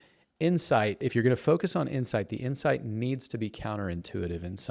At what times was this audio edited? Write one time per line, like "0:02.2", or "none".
0:01.0